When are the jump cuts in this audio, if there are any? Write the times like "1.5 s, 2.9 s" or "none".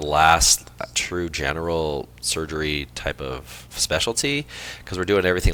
none